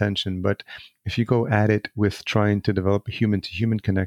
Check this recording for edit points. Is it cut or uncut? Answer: uncut